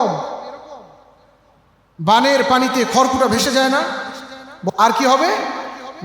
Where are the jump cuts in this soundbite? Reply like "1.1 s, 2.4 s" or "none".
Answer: 4.7 s